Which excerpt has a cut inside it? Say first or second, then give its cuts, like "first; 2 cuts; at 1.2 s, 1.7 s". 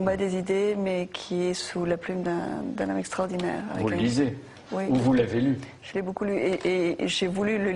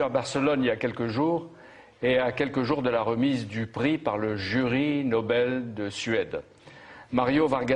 first; 1 cut; at 1.5 s